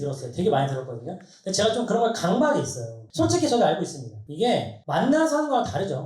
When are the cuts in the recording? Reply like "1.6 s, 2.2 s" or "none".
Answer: 3.0 s